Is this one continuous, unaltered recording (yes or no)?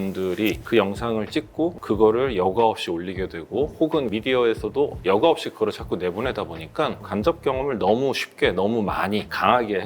no